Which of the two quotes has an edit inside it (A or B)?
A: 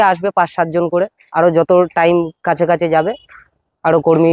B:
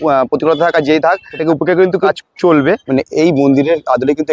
B